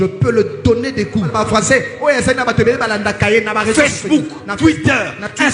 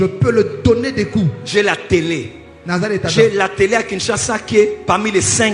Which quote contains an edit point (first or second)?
first